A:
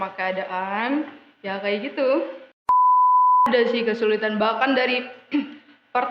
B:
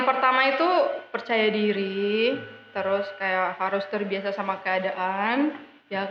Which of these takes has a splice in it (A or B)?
A